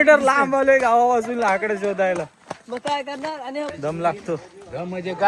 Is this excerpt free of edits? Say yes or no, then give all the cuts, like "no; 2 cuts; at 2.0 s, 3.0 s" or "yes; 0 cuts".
no; 1 cut; at 3.3 s